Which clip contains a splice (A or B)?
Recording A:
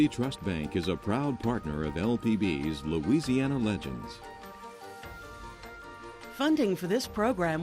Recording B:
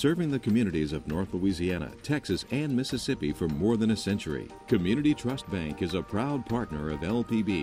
A